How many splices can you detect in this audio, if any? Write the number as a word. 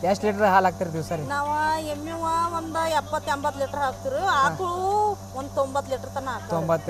zero